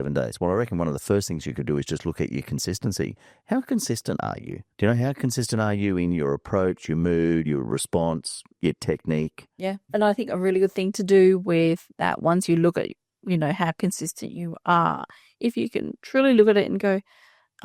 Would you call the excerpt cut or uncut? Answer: uncut